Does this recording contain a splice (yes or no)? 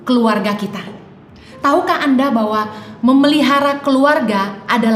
no